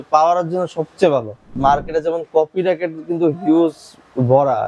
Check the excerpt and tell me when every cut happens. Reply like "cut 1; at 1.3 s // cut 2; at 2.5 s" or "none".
cut 1; at 1.5 s